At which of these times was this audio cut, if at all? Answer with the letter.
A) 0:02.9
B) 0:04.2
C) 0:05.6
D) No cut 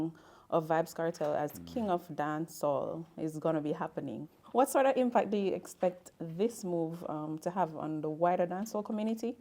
B